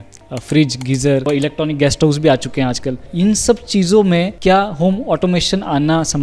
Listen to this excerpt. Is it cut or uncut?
cut